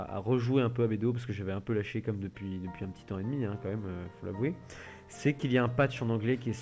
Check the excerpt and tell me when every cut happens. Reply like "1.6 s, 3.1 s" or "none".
4.8 s

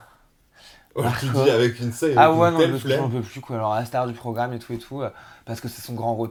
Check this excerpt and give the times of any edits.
none

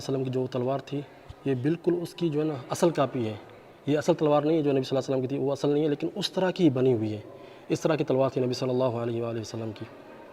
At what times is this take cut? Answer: none

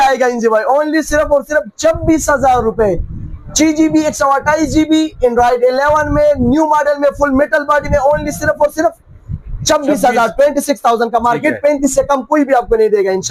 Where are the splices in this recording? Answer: none

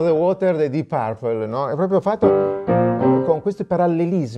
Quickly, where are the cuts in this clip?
none

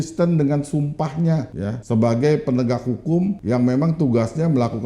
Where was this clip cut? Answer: 1.7 s, 3.4 s

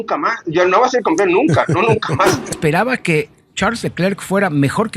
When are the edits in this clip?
2.5 s

